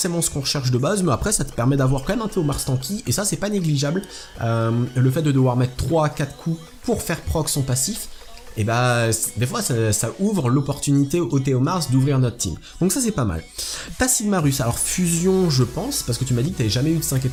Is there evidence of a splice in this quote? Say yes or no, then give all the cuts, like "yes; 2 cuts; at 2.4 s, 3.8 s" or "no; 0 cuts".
no; 0 cuts